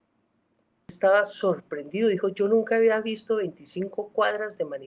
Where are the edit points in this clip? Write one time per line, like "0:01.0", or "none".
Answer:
0:00.9